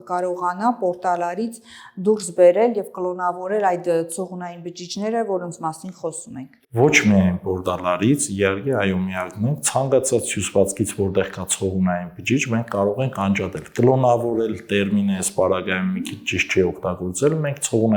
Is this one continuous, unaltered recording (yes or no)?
yes